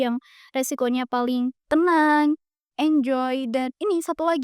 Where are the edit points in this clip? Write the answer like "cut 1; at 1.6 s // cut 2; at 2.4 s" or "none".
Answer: cut 1; at 1.6 s